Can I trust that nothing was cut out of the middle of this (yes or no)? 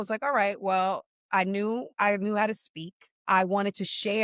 no